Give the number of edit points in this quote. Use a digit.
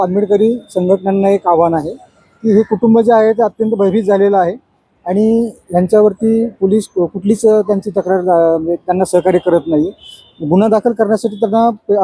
0